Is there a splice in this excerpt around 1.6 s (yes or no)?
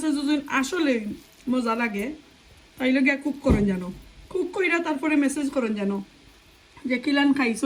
no